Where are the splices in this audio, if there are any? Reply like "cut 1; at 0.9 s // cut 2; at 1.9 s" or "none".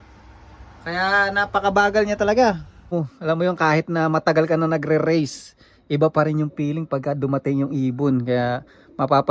cut 1; at 2.9 s